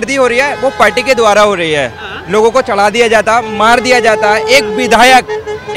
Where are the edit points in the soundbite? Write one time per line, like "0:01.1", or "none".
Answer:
none